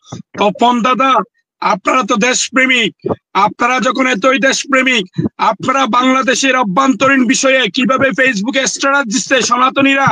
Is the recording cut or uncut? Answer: uncut